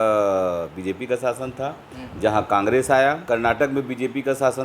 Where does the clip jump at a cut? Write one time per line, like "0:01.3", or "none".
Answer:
0:03.2